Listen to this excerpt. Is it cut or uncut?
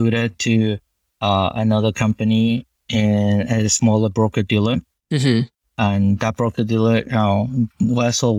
uncut